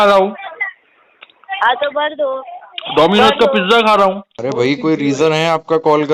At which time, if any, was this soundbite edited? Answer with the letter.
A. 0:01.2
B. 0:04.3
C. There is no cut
B